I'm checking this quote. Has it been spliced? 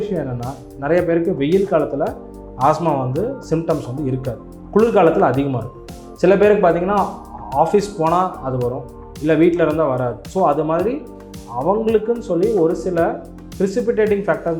no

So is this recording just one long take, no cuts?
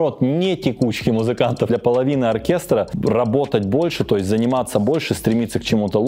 no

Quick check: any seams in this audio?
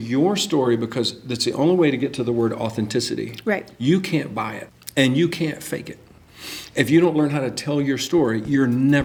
no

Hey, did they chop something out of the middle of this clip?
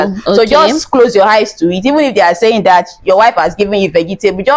no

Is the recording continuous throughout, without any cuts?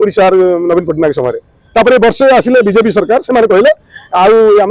yes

